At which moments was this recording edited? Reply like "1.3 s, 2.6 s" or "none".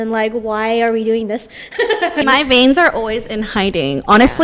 2.2 s